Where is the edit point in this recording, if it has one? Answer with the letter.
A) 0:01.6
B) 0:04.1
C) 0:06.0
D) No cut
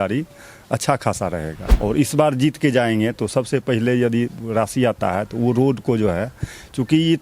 A